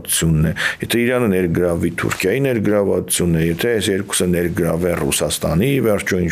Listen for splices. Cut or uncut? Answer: uncut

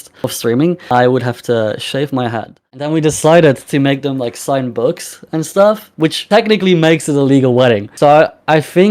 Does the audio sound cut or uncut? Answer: cut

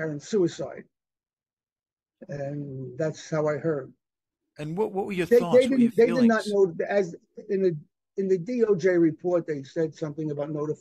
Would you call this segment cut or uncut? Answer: uncut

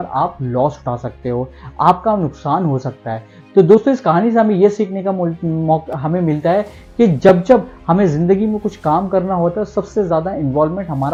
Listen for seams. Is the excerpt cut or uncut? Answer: uncut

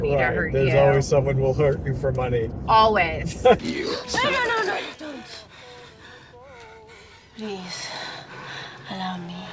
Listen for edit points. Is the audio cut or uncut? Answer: uncut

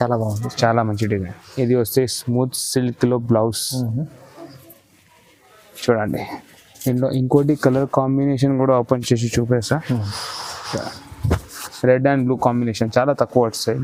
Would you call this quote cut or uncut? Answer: uncut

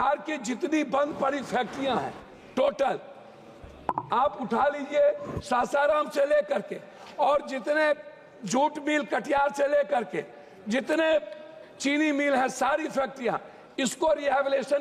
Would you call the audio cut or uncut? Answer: uncut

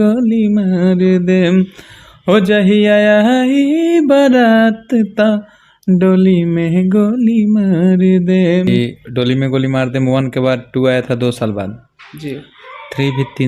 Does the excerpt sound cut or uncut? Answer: cut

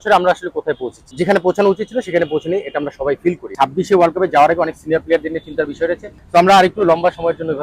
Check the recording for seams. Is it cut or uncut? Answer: cut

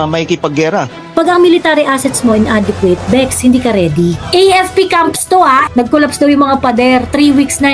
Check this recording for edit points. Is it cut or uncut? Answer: cut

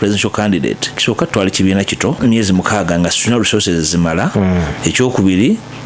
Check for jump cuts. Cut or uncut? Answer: cut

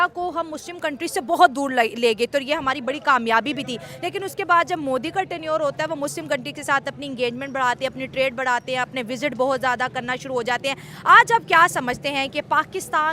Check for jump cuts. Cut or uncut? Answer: uncut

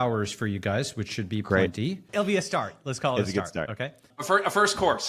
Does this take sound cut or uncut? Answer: cut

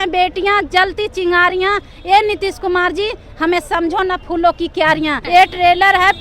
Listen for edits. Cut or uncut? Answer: cut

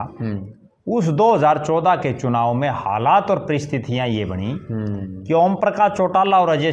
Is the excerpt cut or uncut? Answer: uncut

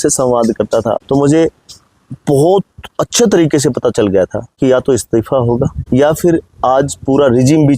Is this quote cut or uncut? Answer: cut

